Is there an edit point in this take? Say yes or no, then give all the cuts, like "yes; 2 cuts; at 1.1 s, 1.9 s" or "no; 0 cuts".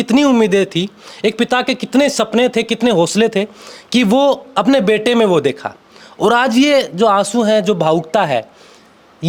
no; 0 cuts